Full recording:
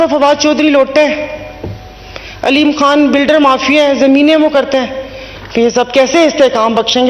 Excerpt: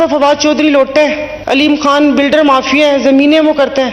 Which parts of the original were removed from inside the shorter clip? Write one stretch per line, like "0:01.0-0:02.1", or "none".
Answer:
0:01.3-0:02.3